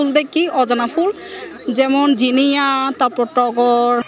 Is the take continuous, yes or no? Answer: yes